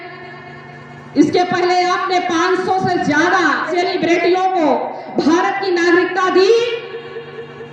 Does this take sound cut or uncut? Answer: cut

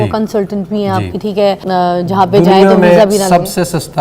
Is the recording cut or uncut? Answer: cut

